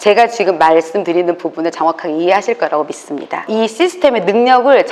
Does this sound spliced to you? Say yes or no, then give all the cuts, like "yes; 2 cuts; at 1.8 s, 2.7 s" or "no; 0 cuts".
yes; 1 cut; at 3.4 s